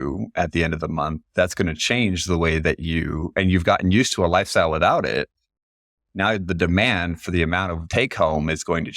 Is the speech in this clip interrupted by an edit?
yes; 1 cut; at 7.8 s

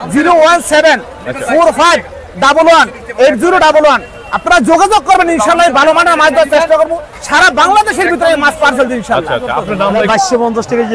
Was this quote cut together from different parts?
yes; 1 cut; at 9.9 s

